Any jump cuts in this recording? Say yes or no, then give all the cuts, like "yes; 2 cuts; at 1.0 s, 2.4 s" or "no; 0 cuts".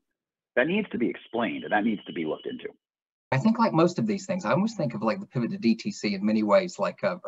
yes; 1 cut; at 3.3 s